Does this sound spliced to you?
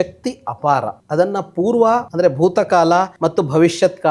yes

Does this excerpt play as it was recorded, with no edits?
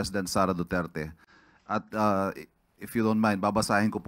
yes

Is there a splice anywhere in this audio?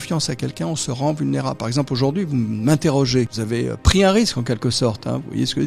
yes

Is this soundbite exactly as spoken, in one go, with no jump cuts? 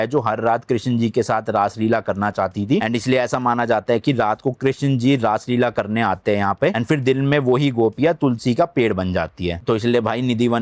yes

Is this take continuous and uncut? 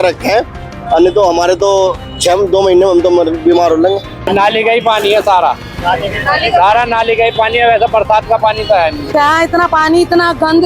no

